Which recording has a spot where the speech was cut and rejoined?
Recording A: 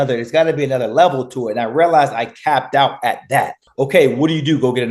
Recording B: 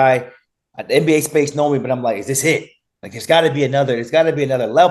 A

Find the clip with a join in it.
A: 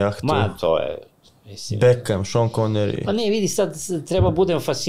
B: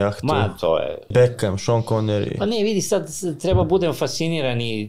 B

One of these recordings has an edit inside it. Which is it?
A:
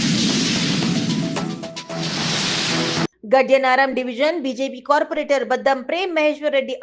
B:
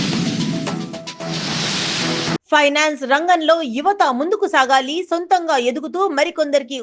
B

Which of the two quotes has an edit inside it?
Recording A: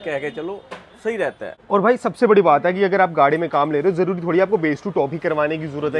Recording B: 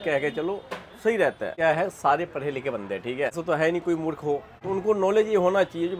B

